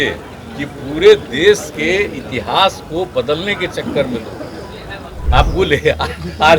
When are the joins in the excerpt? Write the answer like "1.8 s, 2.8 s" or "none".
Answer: 5.2 s